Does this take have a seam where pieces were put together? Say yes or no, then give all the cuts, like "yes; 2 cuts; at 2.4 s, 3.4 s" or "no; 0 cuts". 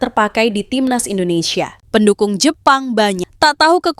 yes; 1 cut; at 1.8 s